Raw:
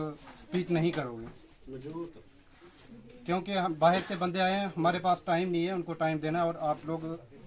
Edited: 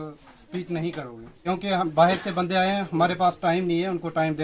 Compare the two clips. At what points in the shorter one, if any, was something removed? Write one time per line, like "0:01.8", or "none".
0:01.5